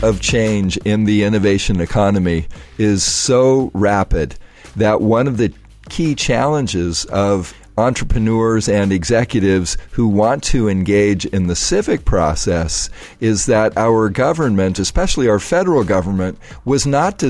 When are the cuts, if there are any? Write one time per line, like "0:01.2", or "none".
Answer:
0:07.6
0:14.7